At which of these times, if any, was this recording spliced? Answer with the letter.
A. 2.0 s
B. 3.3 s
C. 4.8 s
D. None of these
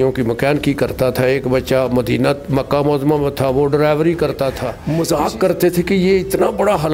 C